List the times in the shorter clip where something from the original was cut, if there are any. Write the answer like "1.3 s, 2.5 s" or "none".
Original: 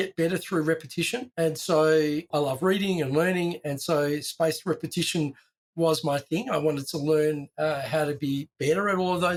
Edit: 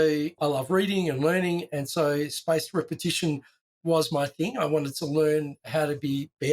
5.6 s